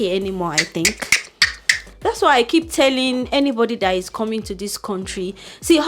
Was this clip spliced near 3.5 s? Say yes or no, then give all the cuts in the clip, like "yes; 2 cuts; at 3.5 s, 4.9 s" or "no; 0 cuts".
no; 1 cut; at 1.8 s